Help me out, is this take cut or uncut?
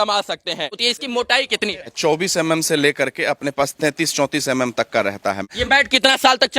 cut